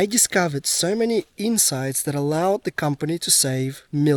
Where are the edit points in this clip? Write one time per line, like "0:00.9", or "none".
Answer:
none